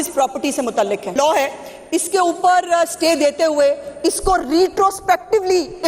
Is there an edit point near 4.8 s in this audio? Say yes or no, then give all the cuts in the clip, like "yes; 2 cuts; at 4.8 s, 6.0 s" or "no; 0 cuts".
no; 1 cut; at 1.1 s